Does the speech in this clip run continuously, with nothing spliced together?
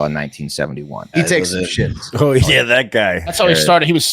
no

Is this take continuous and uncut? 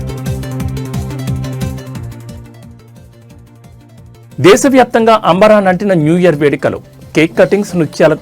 no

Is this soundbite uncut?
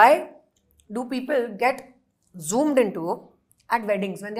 yes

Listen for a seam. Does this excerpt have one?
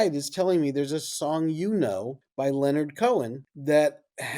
yes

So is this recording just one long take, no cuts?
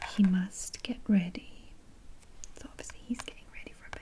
yes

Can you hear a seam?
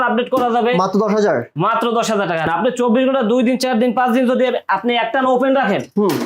yes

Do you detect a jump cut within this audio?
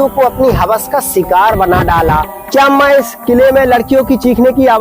yes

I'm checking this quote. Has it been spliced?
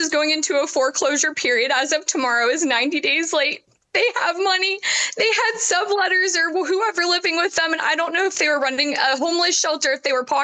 no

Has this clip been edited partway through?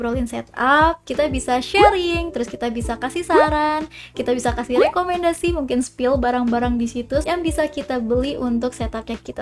no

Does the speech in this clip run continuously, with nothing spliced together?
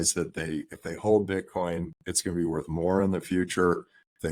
yes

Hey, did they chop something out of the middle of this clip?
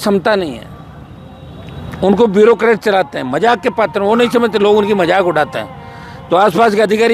no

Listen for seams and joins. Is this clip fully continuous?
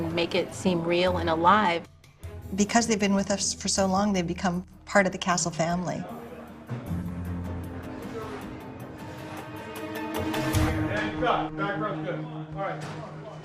no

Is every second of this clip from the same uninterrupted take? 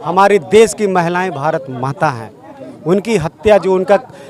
yes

